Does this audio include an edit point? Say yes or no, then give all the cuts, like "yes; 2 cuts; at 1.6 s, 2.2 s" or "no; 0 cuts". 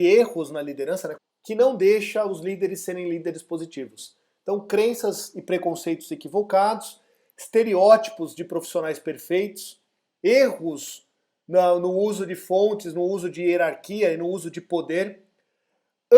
yes; 1 cut; at 1.1 s